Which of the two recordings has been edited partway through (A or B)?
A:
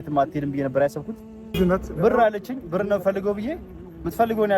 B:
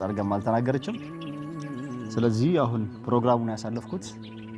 A